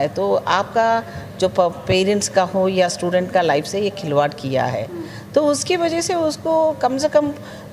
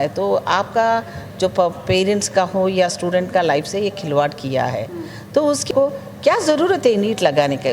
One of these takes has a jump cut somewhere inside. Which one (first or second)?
second